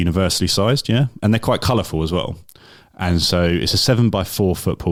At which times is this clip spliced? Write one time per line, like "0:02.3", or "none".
none

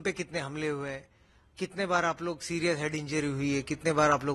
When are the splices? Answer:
none

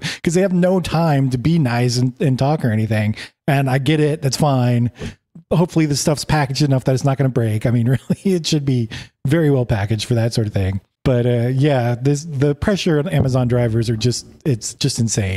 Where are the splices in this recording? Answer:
none

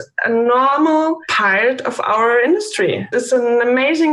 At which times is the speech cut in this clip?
0:01.3
0:03.1

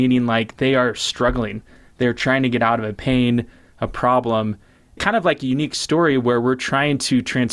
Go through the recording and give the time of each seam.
0:05.0

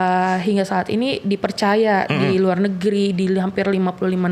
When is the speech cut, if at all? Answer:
none

